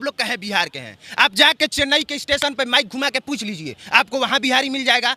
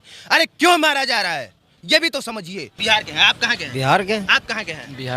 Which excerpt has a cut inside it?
second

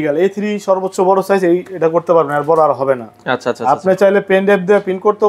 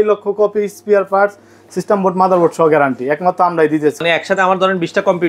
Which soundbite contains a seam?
second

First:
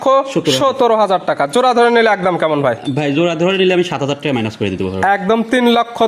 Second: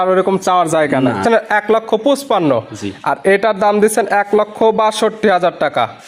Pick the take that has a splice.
second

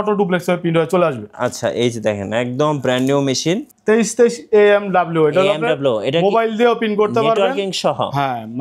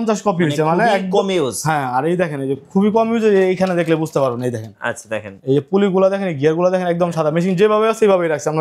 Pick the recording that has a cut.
first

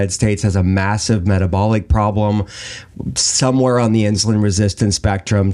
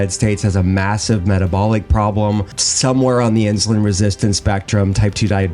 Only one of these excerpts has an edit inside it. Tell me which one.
second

